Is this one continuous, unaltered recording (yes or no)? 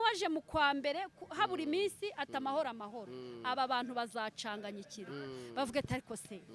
yes